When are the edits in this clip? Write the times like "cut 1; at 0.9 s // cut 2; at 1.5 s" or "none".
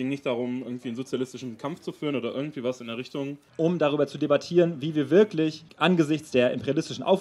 cut 1; at 3.4 s // cut 2; at 5.6 s